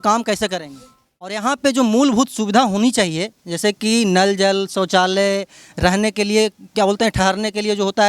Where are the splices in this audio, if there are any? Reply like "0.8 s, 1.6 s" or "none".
1.4 s

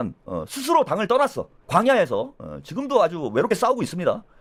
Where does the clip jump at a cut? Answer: none

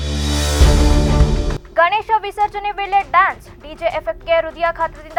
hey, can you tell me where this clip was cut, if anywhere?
none

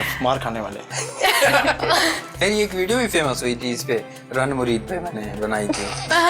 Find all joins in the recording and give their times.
2.3 s

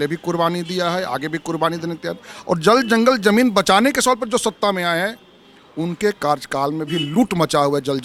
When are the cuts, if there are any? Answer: none

